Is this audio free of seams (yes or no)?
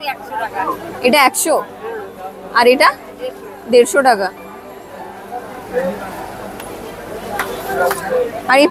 yes